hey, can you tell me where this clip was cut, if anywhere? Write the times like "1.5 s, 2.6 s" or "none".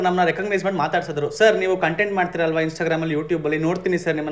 none